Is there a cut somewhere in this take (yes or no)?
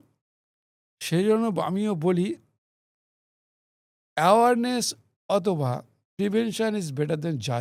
no